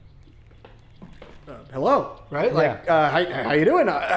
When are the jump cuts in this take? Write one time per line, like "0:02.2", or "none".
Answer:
none